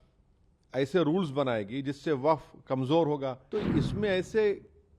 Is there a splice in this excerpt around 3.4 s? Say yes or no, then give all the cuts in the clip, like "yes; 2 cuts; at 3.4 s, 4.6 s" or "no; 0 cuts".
yes; 1 cut; at 3.4 s